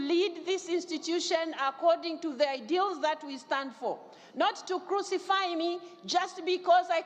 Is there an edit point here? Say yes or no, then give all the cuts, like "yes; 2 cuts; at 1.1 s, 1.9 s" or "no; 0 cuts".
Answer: no; 0 cuts